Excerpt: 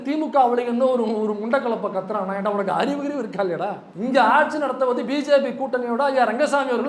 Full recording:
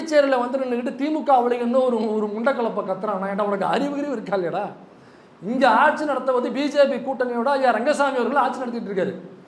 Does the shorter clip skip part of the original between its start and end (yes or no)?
yes